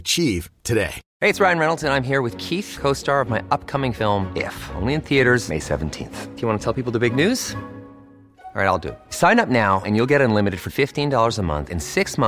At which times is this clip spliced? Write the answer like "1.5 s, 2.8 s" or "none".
none